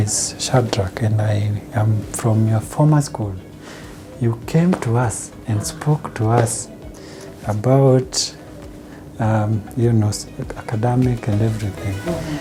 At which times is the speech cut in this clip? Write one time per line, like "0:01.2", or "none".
none